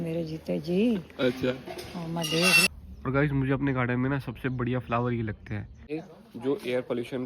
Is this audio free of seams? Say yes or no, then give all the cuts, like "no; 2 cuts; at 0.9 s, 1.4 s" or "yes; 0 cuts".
no; 2 cuts; at 2.7 s, 5.9 s